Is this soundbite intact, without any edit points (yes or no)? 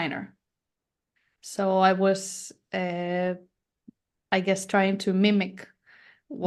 yes